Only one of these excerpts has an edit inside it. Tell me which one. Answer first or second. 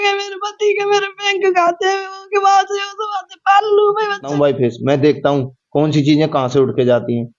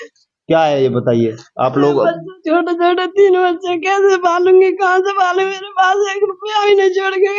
first